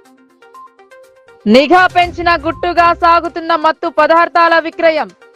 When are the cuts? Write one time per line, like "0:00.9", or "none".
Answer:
0:01.1